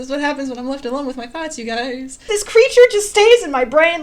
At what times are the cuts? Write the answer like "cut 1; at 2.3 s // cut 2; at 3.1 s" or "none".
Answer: cut 1; at 2.3 s